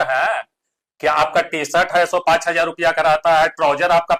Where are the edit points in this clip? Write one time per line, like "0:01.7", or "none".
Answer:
none